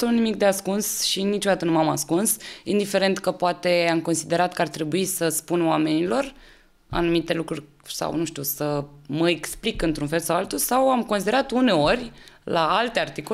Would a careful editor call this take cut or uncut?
uncut